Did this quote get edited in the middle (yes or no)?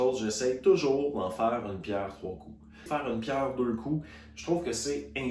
yes